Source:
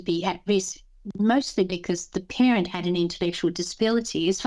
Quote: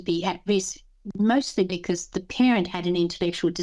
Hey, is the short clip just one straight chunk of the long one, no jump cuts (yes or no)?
yes